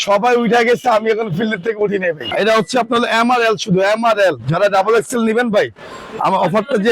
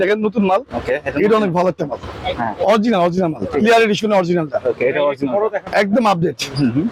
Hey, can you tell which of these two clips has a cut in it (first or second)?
first